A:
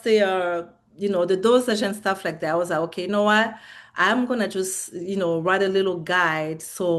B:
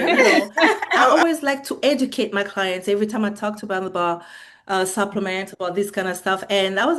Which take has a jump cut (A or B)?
B